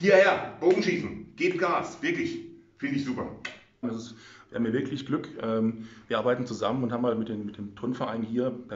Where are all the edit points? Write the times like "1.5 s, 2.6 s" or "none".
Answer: none

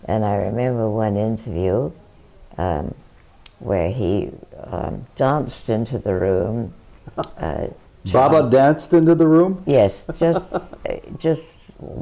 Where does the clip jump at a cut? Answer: none

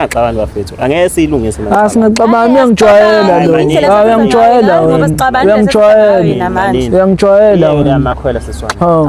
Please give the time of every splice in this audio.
none

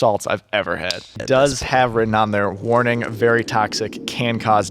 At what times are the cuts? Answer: 1.1 s

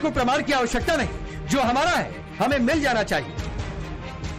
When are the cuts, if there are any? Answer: 1.6 s

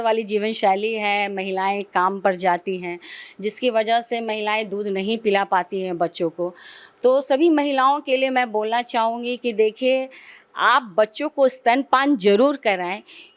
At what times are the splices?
none

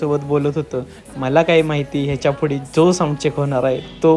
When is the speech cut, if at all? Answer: none

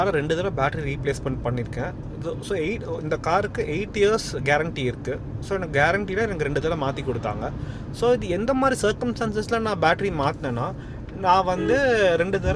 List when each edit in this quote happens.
none

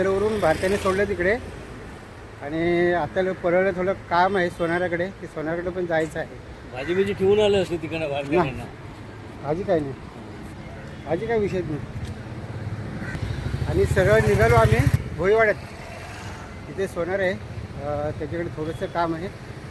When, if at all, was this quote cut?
13.1 s, 15.0 s

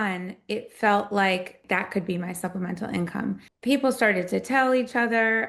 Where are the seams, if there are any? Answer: 1.6 s, 3.5 s

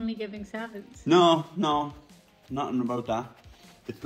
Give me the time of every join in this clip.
none

